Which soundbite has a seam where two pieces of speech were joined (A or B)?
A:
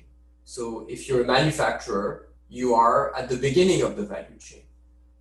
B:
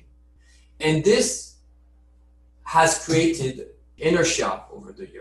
B